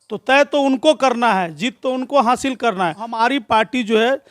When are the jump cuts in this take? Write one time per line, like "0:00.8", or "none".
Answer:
0:03.1